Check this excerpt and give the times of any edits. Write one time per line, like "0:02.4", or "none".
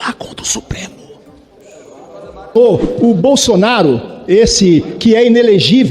0:02.5